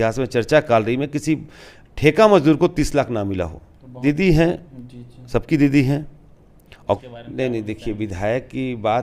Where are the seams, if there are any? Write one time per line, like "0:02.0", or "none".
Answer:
0:04.0
0:07.0